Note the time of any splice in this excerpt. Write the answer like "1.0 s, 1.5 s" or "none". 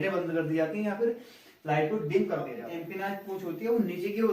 2.5 s